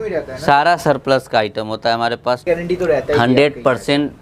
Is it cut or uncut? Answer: cut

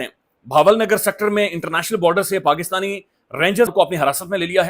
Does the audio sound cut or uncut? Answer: cut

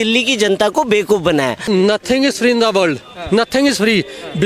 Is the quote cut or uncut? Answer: cut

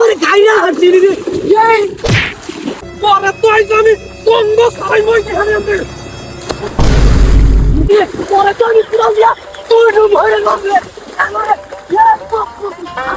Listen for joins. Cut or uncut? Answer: cut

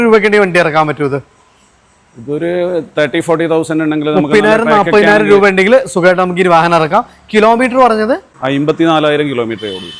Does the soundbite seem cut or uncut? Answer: uncut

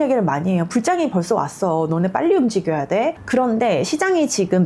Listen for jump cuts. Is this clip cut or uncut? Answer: cut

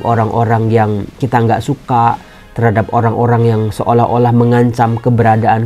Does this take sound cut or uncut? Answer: cut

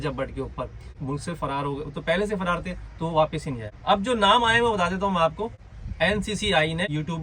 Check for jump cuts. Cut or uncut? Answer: uncut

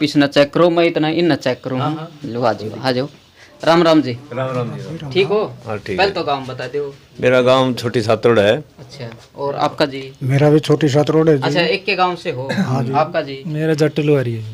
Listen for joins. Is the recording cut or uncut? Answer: uncut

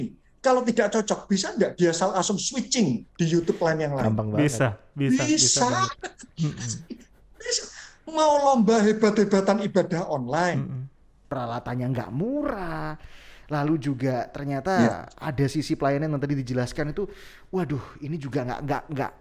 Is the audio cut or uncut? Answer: cut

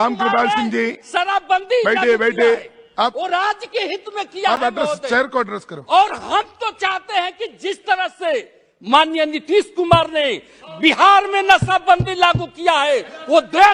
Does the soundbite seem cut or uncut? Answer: uncut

